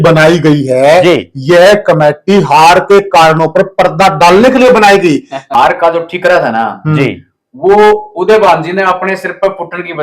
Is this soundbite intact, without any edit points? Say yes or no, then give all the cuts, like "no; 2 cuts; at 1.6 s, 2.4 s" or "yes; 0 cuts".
no; 1 cut; at 5.4 s